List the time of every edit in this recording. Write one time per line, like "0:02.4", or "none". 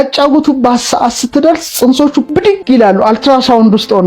0:02.4